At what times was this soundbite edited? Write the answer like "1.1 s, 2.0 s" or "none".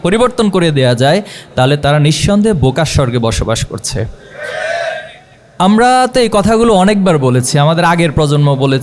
none